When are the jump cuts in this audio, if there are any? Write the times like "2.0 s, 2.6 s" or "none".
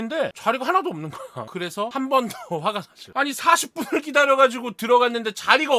none